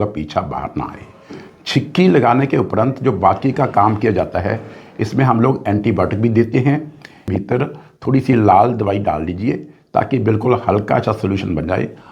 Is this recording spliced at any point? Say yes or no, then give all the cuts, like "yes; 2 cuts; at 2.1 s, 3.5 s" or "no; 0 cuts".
yes; 1 cut; at 7.3 s